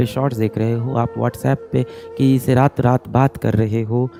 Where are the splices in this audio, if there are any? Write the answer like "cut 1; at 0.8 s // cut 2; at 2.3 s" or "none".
none